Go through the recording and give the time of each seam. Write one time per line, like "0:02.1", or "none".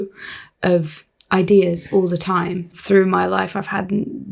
0:02.8